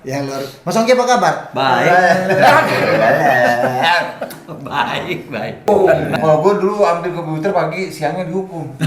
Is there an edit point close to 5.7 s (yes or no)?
yes